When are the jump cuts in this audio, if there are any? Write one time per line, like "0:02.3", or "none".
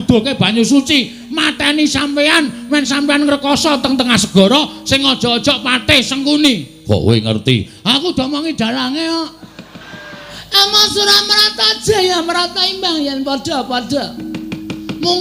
0:10.4